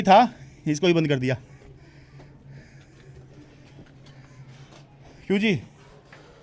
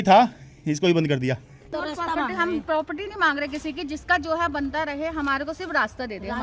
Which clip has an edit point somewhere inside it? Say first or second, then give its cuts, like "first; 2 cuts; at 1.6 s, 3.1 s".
second; 1 cut; at 1.6 s